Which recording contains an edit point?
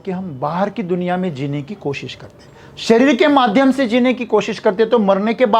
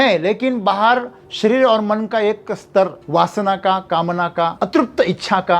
second; 2 cuts; at 3.0 s, 4.5 s

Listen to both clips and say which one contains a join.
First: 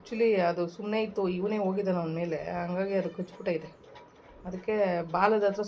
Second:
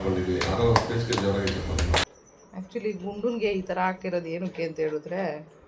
second; 1 cut; at 2.0 s

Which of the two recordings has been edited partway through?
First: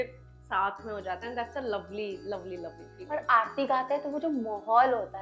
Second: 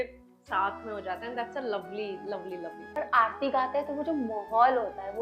second; 1 cut; at 2.8 s

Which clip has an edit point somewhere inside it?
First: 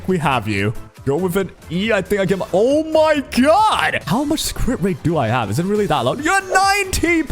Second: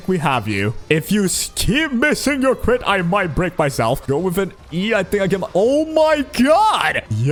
first; 2 cuts; at 0.9 s, 4.0 s

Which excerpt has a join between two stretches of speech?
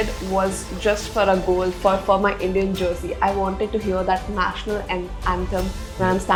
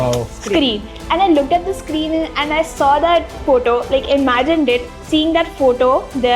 second; 1 cut; at 4.9 s

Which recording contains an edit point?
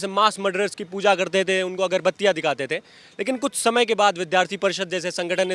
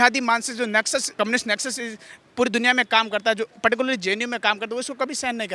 second; 1 cut; at 1.2 s

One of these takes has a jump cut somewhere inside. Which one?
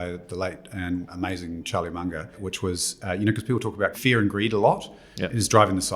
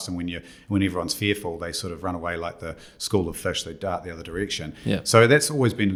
first; 3 cuts; at 1.1 s, 2.4 s, 4.0 s

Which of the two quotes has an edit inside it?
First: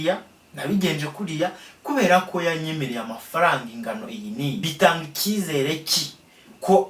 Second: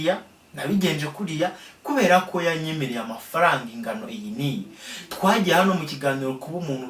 first; 1 cut; at 4.6 s

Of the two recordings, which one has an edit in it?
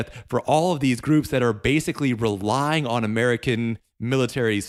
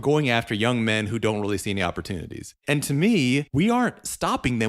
second; 2 cuts; at 2.6 s, 3.5 s

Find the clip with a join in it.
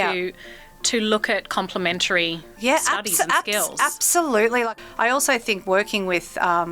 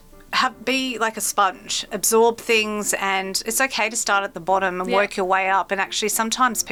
first; 1 cut; at 4.7 s

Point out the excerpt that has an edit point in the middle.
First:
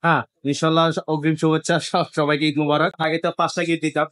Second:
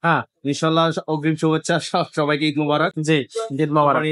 first; 1 cut; at 3.0 s

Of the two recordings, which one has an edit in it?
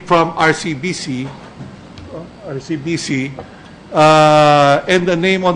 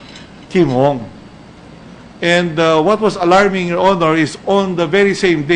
second; 1 cut; at 4.1 s

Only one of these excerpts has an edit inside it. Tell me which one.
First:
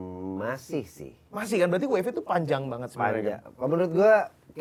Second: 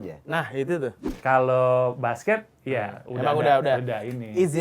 second; 1 cut; at 1.1 s

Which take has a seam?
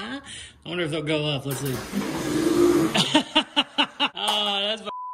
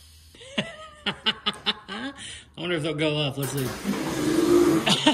first; 1 cut; at 4.1 s

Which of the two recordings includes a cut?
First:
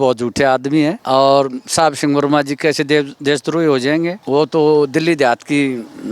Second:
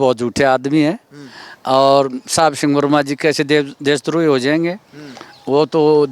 first; 2 cuts; at 1.0 s, 4.2 s

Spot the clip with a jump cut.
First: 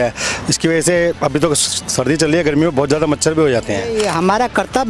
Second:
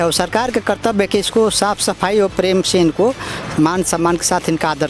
first; 1 cut; at 3.9 s

